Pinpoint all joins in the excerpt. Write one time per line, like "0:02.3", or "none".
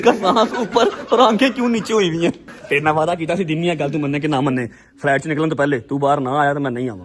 0:02.5